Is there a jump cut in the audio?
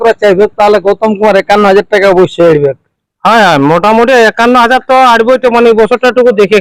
no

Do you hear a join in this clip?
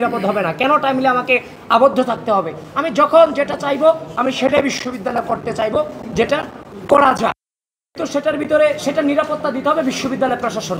no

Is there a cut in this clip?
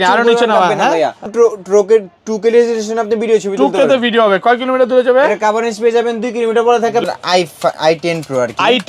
yes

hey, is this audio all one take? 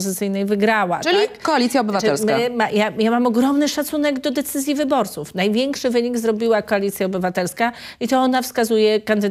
yes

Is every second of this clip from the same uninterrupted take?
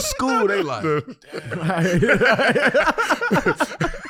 yes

